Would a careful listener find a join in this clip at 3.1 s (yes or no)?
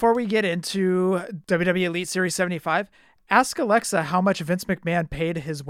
no